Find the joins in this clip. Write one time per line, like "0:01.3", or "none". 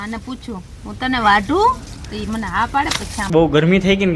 0:03.2